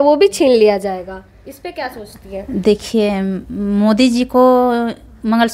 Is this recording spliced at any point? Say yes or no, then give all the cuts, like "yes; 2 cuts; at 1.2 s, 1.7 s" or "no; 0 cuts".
no; 0 cuts